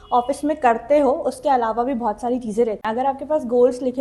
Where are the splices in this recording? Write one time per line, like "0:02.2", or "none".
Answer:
0:02.8